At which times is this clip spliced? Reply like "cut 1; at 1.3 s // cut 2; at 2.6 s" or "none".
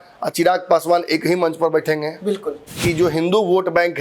cut 1; at 2.7 s

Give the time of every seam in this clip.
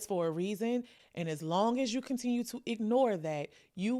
cut 1; at 0.9 s

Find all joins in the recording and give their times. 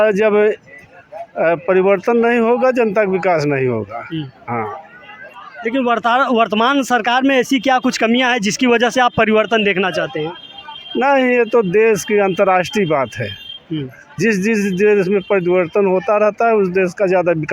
none

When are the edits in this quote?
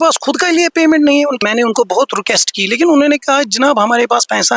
cut 1; at 1.4 s

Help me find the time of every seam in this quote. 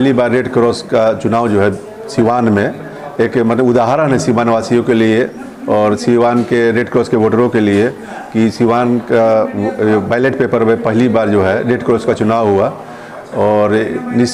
none

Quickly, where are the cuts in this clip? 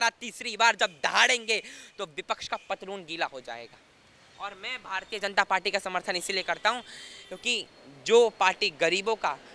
none

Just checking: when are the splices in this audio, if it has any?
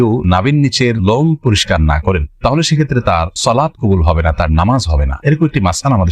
none

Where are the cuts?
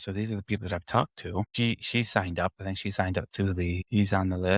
none

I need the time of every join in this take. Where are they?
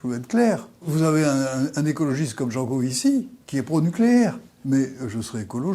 cut 1; at 0.9 s // cut 2; at 4.5 s

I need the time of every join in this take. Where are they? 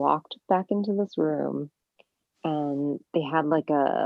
none

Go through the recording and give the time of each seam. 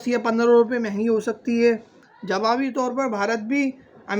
cut 1; at 2.0 s

